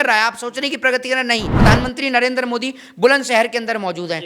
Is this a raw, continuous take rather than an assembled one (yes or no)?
no